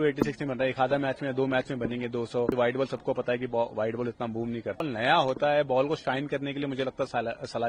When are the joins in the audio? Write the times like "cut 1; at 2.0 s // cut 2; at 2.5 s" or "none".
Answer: cut 1; at 2.5 s // cut 2; at 4.8 s